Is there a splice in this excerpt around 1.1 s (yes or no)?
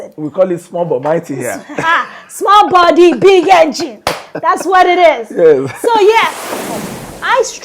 no